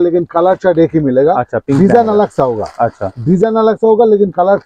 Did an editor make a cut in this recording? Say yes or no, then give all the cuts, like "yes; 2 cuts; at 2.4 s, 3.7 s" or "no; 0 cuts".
no; 0 cuts